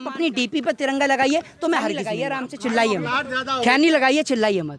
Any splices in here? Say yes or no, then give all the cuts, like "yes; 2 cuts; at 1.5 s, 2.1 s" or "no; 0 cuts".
yes; 1 cut; at 2.1 s